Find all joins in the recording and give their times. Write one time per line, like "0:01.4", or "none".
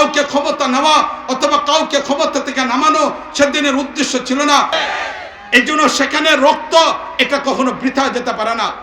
0:04.7

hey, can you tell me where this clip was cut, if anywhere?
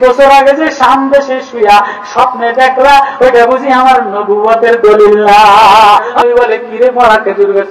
0:06.1

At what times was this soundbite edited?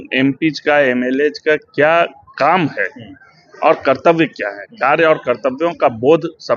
none

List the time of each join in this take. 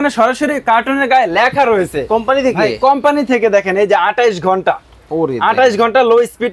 none

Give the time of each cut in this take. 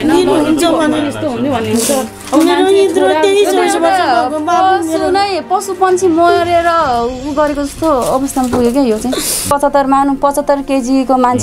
0:09.5

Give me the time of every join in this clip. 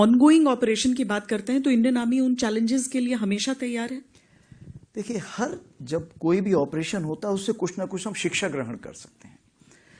none

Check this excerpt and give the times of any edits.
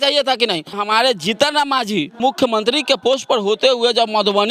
0:00.8
0:02.2

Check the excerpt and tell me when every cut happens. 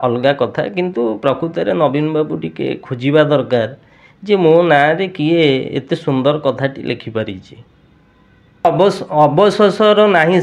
0:08.6

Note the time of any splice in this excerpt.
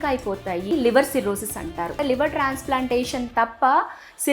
0:00.7
0:02.0

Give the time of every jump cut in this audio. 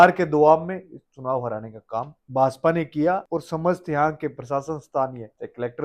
none

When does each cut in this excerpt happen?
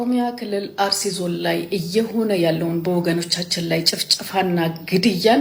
none

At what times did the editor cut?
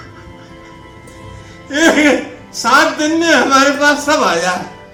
none

